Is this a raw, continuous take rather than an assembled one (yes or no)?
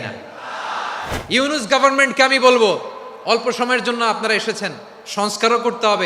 no